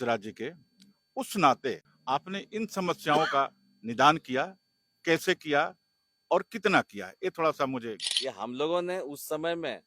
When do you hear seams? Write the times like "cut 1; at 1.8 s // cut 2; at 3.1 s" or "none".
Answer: cut 1; at 1.9 s // cut 2; at 8.0 s